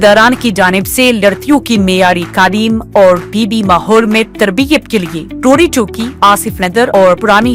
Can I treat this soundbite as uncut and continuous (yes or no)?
yes